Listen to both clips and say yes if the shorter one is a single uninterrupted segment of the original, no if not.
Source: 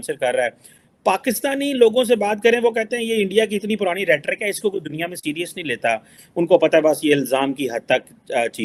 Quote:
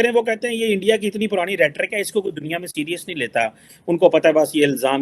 yes